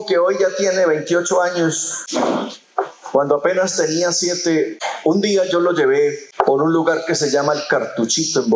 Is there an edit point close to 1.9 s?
yes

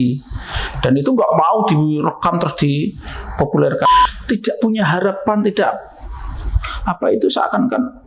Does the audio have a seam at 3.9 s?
yes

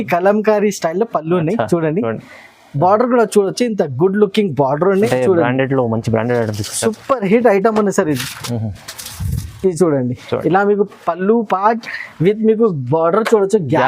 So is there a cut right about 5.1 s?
yes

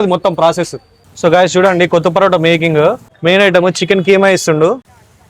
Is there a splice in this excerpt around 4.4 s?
no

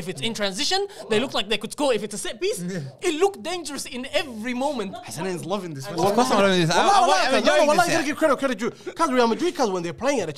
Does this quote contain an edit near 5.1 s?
yes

